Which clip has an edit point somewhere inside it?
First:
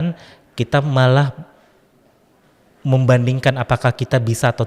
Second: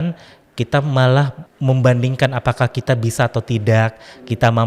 second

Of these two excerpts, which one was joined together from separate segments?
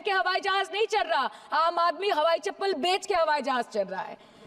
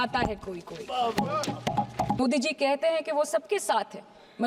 second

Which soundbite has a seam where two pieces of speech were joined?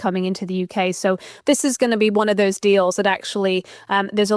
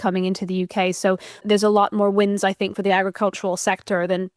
second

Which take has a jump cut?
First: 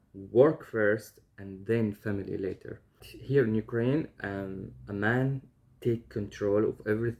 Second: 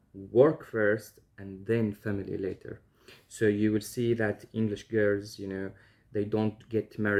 first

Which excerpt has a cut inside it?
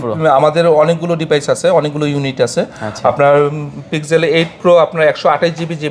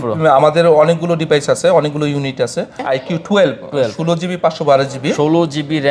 second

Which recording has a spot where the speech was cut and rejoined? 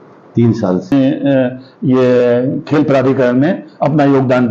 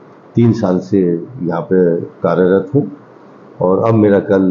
first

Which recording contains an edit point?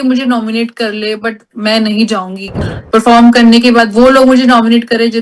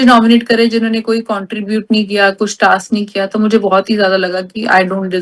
first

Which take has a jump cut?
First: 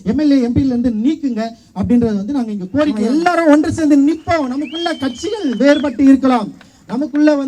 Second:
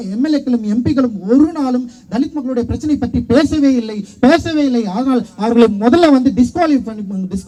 first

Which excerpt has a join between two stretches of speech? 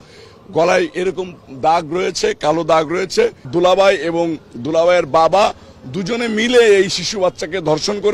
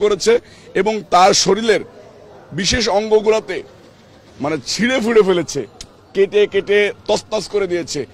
first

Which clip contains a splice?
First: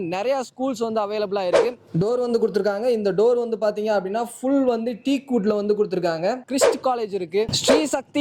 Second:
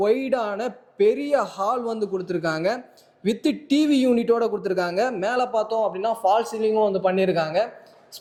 first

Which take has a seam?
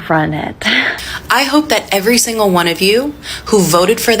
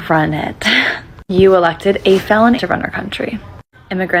first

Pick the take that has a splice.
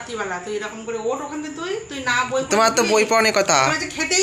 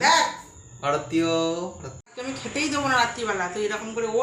second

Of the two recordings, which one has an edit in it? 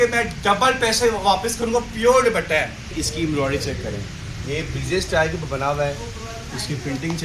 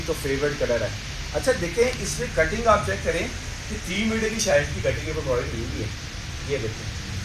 first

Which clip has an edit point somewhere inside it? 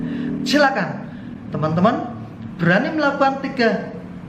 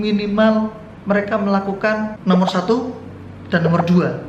second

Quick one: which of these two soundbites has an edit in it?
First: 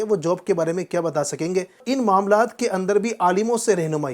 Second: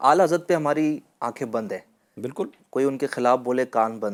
first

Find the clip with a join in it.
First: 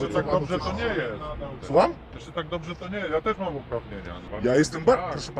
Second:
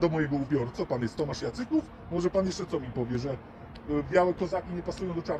first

